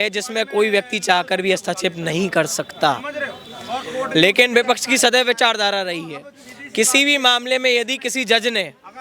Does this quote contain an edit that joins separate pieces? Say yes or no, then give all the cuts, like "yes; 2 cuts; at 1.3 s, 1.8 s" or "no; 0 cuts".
no; 0 cuts